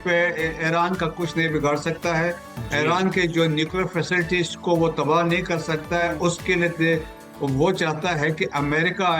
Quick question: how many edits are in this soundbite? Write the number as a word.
zero